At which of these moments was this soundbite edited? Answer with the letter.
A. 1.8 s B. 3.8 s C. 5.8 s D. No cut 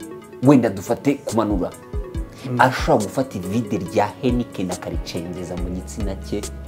D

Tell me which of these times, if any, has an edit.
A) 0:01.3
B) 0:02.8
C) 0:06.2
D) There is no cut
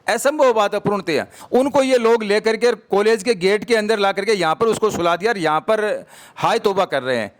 A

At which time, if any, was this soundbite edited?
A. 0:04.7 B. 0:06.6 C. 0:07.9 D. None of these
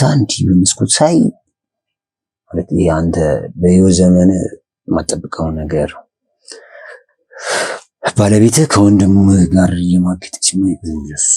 D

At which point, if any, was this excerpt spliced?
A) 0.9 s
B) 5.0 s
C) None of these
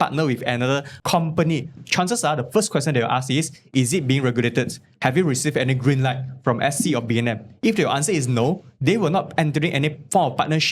A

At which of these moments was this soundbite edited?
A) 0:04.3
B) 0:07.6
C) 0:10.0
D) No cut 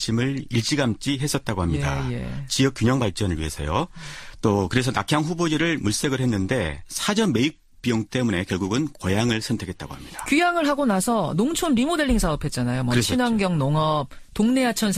C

